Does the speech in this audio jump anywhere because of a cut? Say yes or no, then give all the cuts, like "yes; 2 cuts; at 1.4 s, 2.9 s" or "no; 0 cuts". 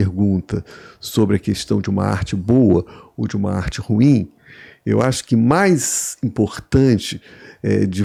no; 0 cuts